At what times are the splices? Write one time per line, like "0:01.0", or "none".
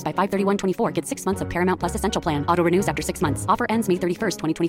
none